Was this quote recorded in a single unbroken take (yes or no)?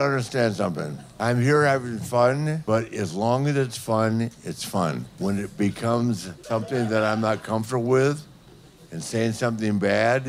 no